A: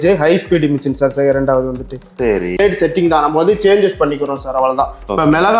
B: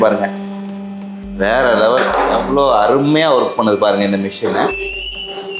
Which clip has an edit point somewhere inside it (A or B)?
A